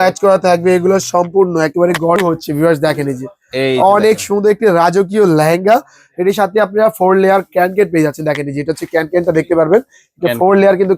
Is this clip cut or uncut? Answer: cut